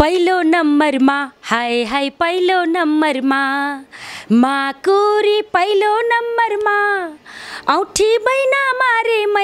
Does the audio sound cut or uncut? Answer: uncut